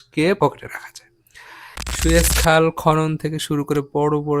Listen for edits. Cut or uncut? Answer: cut